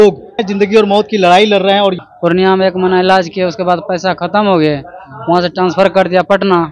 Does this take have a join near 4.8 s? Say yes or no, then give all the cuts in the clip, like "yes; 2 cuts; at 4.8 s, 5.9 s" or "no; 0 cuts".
no; 1 cut; at 2.0 s